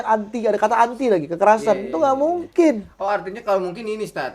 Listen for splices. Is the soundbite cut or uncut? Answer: uncut